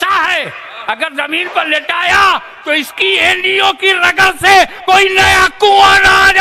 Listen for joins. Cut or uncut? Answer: uncut